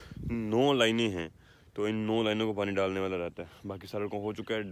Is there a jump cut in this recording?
no; 0 cuts

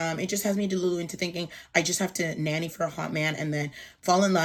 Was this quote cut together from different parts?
no; 0 cuts

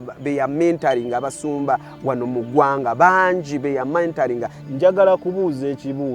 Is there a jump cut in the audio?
yes; 1 cut; at 4.5 s

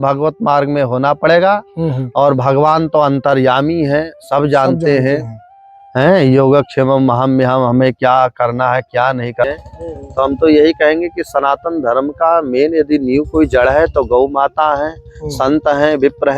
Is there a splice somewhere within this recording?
yes; 1 cut; at 9.4 s

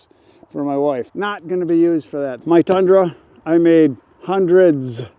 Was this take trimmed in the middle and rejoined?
yes; 2 cuts; at 1.1 s, 2.3 s

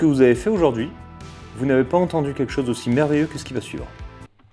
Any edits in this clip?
no; 0 cuts

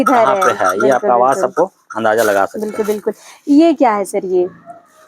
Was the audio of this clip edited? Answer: no; 0 cuts

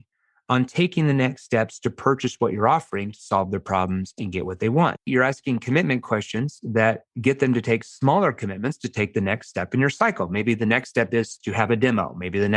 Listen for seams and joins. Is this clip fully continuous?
no; 1 cut; at 5.0 s

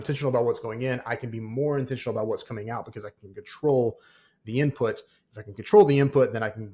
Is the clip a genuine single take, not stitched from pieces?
yes; 0 cuts

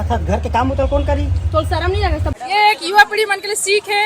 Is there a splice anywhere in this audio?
yes; 1 cut; at 2.3 s

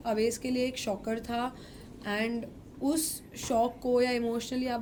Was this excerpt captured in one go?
yes; 0 cuts

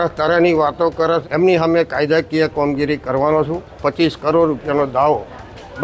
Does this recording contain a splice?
yes; 2 cuts; at 1.2 s, 3.6 s

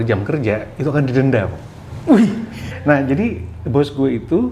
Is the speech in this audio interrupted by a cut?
yes; 1 cut; at 2.5 s

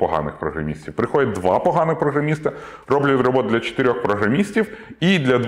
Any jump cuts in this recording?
no; 0 cuts

